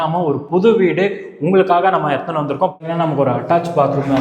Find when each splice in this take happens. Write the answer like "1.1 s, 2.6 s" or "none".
2.8 s

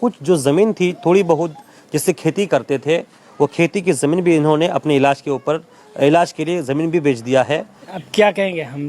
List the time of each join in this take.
7.7 s

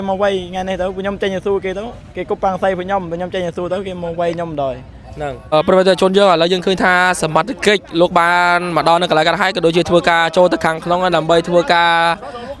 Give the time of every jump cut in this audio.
5.5 s

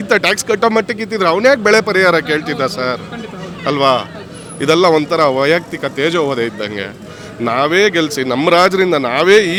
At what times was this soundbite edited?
none

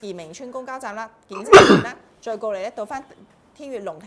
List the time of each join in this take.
none

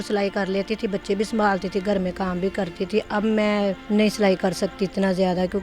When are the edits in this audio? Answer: 3.8 s

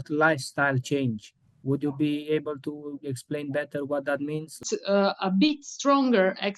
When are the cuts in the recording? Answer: 4.6 s

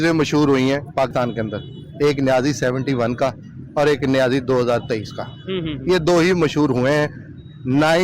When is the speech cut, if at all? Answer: 1.1 s

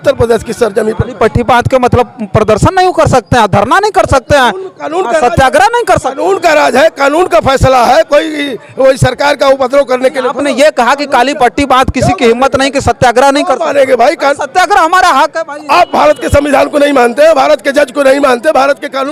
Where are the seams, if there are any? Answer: none

